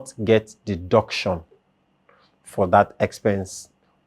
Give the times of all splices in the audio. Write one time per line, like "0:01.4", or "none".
none

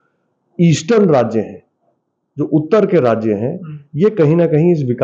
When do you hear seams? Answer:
none

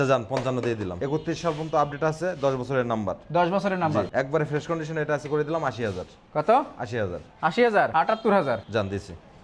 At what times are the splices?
0:00.9
0:07.9

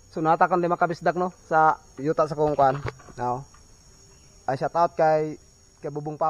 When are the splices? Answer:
none

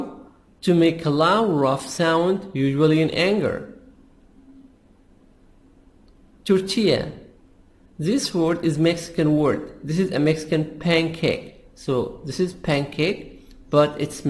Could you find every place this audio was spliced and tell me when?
0:06.5

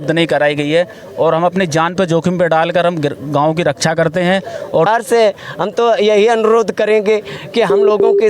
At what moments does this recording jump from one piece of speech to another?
0:04.9

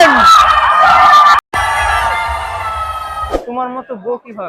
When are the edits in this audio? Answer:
0:03.3

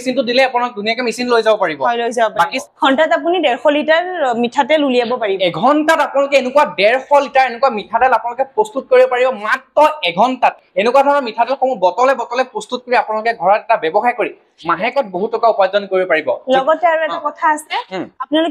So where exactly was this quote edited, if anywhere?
0:02.6
0:05.3
0:10.6

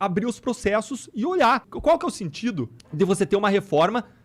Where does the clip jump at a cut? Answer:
0:01.7
0:02.8

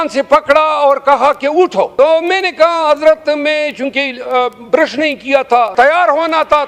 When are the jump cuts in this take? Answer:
0:01.9
0:05.7

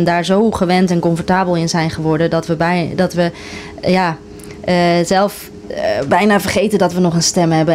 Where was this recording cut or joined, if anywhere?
none

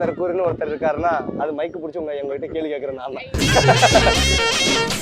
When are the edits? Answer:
0:03.4

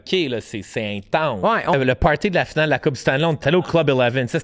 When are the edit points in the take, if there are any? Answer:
0:01.7
0:03.4

